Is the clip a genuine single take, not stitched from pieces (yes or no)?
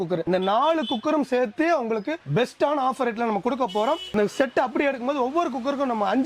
no